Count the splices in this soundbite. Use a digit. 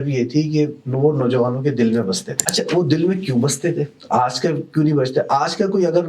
1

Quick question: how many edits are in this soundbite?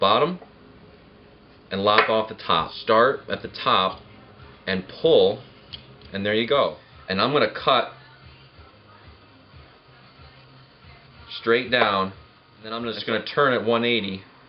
3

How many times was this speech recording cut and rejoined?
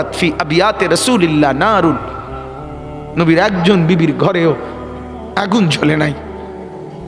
1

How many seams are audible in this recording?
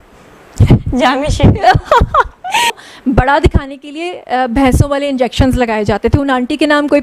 1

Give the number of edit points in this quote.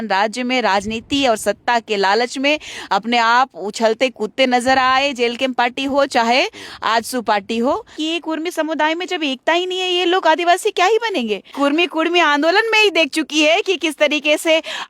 2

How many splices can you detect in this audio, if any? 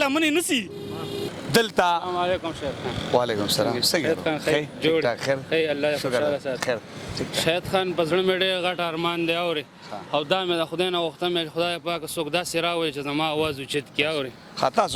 1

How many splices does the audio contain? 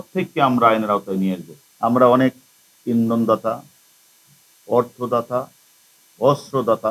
1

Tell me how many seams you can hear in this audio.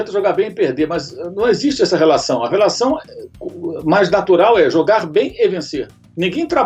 0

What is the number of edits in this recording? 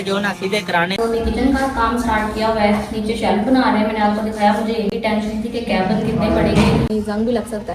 2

